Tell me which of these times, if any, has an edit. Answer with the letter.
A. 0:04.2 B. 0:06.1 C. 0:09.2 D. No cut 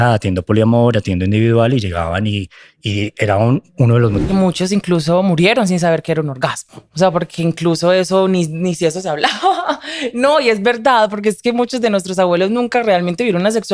A